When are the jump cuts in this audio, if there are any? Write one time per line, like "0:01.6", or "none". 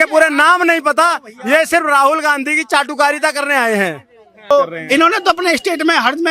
0:04.5